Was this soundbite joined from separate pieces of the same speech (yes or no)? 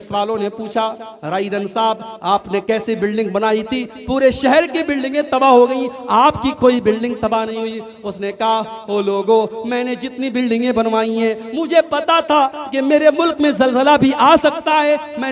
no